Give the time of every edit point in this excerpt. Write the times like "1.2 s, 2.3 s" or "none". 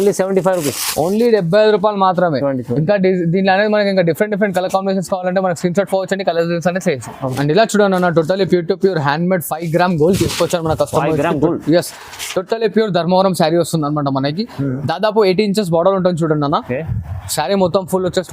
7.2 s

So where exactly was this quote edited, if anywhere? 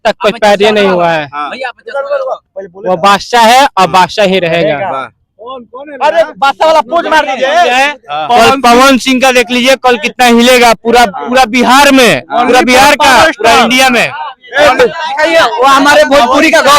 14.8 s

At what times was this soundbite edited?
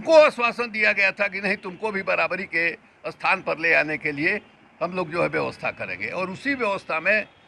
none

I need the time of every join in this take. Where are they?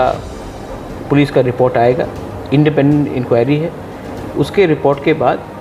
none

